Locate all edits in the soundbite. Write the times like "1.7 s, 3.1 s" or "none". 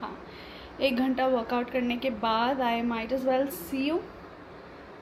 none